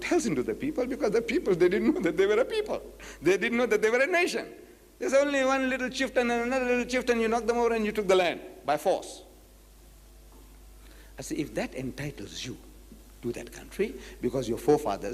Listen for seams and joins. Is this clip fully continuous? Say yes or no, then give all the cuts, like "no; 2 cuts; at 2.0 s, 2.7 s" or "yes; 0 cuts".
no; 1 cut; at 4.5 s